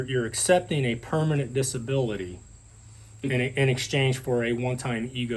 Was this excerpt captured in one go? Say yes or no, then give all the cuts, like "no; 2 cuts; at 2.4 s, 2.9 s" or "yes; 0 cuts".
yes; 0 cuts